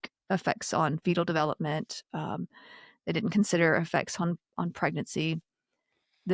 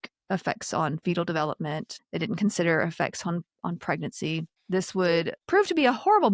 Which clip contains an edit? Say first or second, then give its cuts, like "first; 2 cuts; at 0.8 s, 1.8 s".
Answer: second; 3 cuts; at 2.0 s, 4.6 s, 5.4 s